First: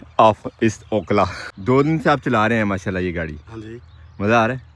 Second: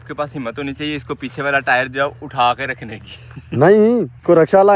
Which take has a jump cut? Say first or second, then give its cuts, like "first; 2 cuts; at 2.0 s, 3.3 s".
first; 1 cut; at 1.5 s